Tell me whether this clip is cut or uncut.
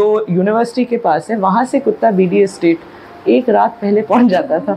uncut